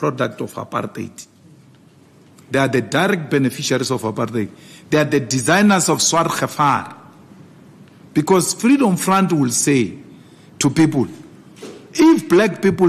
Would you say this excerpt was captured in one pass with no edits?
yes; 0 cuts

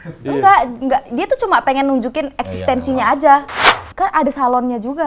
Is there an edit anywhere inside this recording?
yes; 1 cut; at 3.6 s

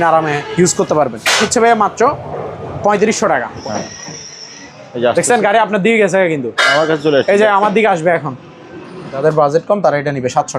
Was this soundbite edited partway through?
yes; 3 cuts; at 1.4 s, 3.5 s, 9.2 s

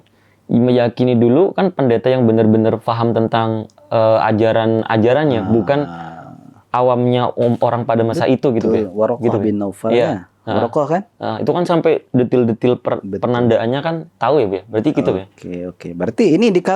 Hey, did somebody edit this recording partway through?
no; 0 cuts

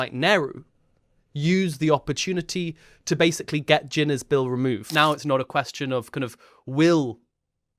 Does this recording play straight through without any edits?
no; 1 cut; at 4.9 s

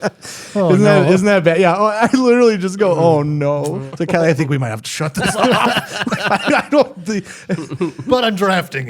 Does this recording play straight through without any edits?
no; 1 cut; at 3.8 s

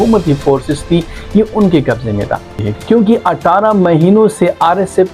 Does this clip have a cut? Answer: yes; 1 cut; at 2.6 s

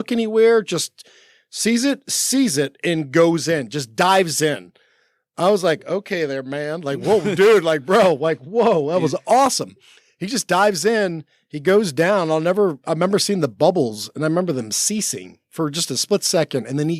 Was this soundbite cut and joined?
no; 0 cuts

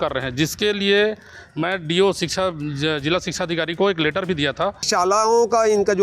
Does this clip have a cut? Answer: yes; 1 cut; at 4.9 s

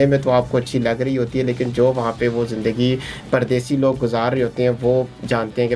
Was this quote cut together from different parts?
no; 0 cuts

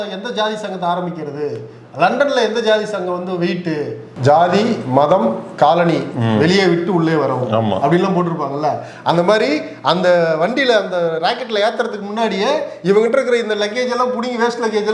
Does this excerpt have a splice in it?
yes; 1 cut; at 4.1 s

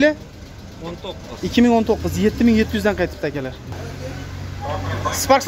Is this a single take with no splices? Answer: no; 1 cut; at 3.8 s

